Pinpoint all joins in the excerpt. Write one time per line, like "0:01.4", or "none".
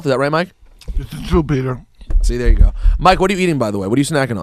none